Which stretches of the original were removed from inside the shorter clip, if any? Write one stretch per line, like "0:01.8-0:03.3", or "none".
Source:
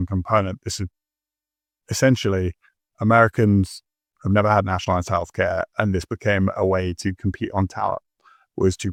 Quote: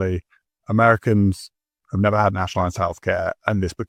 none